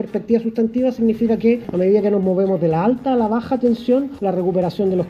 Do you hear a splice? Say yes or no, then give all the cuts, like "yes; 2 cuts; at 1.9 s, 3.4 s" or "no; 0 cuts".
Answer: yes; 2 cuts; at 1.7 s, 4.1 s